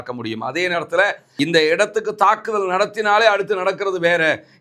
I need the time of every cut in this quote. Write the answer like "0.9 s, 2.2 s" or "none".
1.2 s